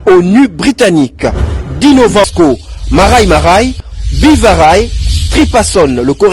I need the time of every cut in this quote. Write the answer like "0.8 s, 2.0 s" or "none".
2.3 s